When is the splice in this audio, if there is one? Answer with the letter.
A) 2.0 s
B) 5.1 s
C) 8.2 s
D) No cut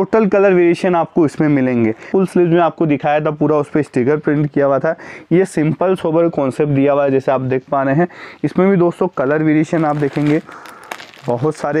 A